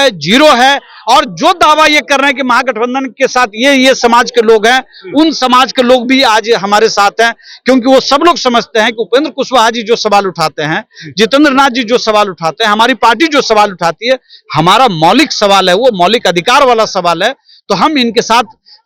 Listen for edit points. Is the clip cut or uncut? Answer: uncut